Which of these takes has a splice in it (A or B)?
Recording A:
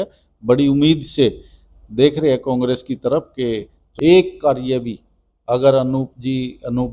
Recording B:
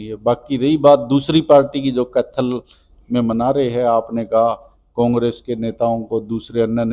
A